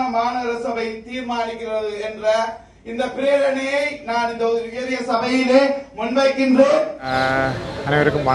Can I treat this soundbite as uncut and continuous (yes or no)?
no